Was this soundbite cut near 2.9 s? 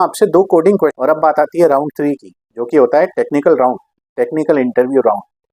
no; 1 cut; at 0.9 s

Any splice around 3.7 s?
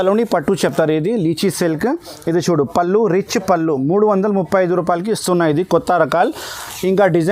no; 0 cuts

